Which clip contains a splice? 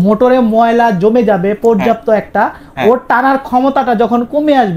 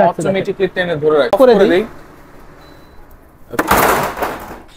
second; 1 cut; at 1.3 s

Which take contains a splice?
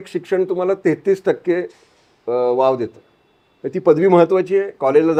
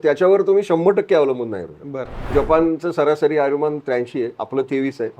second; 1 cut; at 2.2 s

